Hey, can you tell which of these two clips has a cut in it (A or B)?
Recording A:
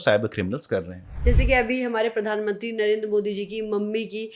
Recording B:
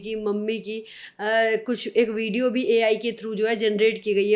A